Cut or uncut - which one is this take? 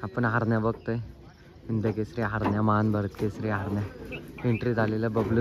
uncut